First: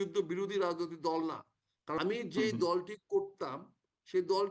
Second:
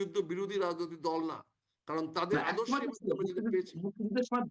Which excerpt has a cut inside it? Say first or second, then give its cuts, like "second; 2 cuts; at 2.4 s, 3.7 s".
first; 1 cut; at 2.0 s